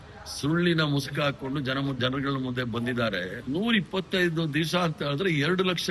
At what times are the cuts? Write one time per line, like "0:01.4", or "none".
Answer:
0:03.4